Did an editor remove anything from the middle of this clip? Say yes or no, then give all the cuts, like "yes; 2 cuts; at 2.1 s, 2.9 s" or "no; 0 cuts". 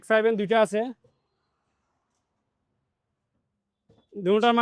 no; 0 cuts